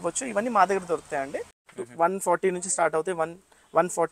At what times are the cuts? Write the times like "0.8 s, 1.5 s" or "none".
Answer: 1.5 s